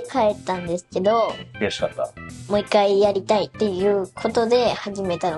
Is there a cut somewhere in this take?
yes; 2 cuts; at 2.3 s, 3.5 s

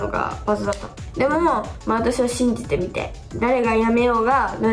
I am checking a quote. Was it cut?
yes; 2 cuts; at 1.0 s, 1.7 s

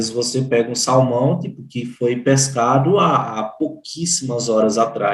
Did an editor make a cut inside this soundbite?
no; 0 cuts

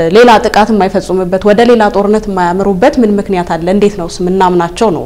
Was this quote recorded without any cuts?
yes; 0 cuts

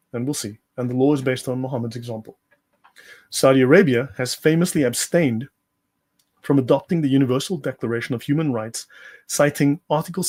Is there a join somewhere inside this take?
no; 0 cuts

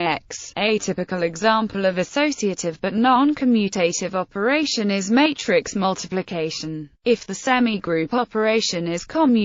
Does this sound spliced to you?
no; 0 cuts

